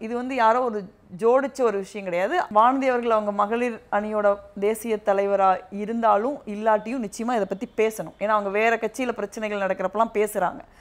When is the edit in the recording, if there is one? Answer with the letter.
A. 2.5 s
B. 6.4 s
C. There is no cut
A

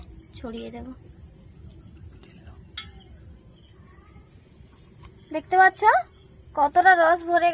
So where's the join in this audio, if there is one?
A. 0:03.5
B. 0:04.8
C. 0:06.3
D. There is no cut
A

